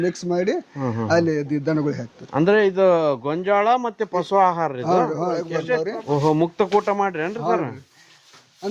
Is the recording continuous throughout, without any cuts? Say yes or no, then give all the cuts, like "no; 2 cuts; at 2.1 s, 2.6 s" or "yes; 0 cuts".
no; 1 cut; at 5.4 s